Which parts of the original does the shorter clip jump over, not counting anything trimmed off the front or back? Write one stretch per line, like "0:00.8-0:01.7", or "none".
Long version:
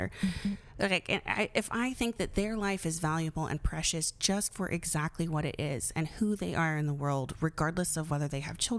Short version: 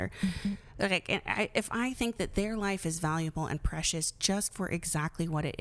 none